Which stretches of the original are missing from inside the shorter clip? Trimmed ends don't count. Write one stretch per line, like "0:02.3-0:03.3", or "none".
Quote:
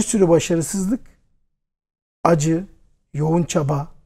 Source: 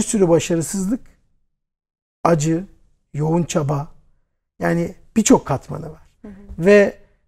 none